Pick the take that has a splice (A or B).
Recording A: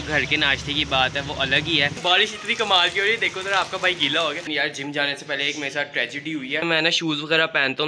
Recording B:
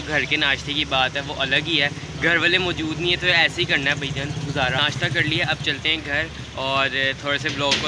A